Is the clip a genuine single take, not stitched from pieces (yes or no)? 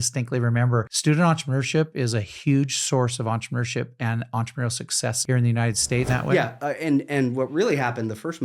no